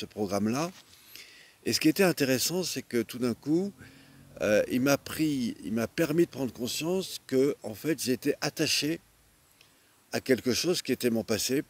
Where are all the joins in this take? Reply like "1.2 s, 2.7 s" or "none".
none